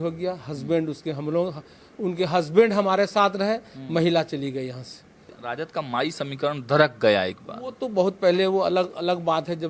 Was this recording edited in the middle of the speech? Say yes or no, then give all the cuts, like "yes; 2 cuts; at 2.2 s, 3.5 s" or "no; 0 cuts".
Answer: yes; 1 cut; at 5.3 s